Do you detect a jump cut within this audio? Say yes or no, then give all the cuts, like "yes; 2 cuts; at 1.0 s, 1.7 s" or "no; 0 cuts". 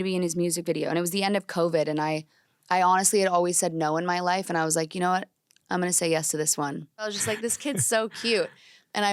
yes; 1 cut; at 7.1 s